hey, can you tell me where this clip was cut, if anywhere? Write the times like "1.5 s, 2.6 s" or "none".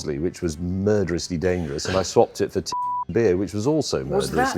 1.7 s